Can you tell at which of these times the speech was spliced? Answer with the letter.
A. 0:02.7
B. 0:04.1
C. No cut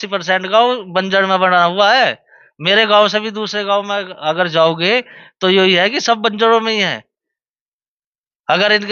C